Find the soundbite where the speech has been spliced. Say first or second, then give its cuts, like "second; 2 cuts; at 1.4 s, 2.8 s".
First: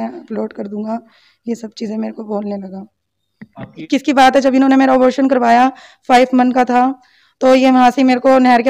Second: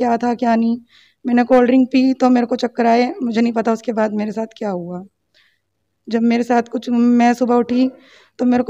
first; 1 cut; at 3.8 s